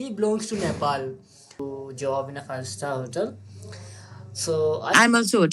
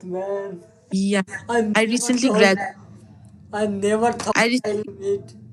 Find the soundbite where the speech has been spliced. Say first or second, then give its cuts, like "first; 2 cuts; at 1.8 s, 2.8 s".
first; 1 cut; at 1.6 s